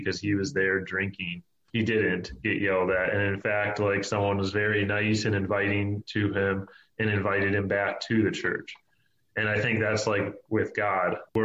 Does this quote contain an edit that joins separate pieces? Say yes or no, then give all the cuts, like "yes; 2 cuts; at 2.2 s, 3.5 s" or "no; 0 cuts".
no; 0 cuts